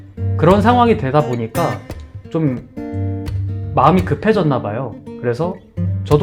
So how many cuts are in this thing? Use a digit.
0